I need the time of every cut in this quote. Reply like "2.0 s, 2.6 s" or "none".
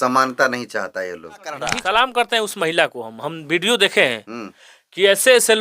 1.7 s